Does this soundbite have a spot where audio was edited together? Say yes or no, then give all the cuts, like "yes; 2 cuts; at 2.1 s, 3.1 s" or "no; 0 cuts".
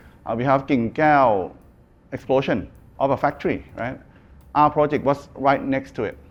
no; 0 cuts